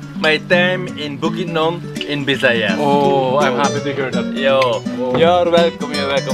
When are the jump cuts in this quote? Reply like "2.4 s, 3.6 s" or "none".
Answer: none